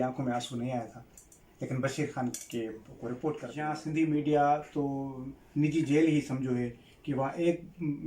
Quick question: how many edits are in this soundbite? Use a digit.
1